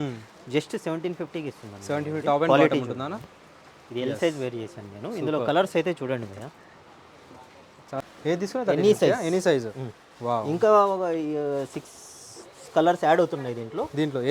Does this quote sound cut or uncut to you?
cut